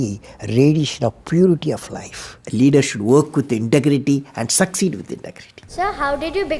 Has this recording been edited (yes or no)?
yes